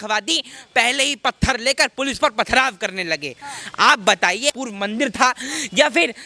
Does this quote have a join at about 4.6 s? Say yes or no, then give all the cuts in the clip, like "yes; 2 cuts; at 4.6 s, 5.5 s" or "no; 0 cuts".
yes; 1 cut; at 4.6 s